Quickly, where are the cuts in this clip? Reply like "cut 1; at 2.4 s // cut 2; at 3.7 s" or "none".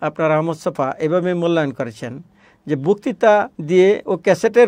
cut 1; at 3.6 s